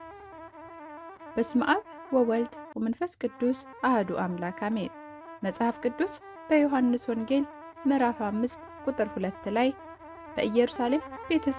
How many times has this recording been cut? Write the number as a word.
one